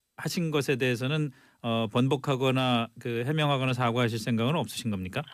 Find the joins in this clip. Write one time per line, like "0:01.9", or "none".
none